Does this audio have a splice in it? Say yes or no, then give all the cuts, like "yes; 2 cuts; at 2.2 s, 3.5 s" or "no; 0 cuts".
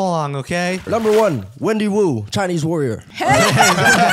yes; 2 cuts; at 0.8 s, 3.1 s